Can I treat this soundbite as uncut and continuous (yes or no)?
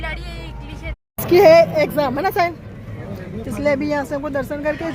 no